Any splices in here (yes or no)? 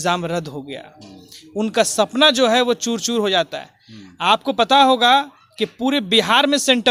no